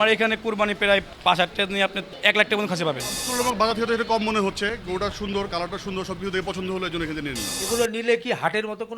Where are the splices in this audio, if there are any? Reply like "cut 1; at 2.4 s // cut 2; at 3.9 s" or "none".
cut 1; at 1.1 s // cut 2; at 2.1 s // cut 3; at 3.2 s // cut 4; at 7.5 s